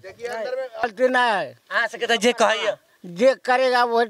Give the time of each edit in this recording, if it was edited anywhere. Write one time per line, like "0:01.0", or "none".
0:00.9